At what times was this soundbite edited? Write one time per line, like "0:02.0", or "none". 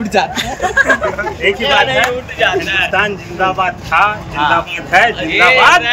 none